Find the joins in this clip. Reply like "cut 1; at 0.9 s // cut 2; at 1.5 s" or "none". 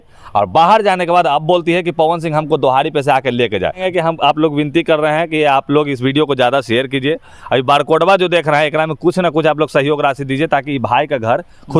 cut 1; at 3.8 s